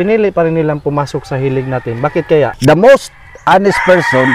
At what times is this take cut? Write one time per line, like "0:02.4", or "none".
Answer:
0:02.6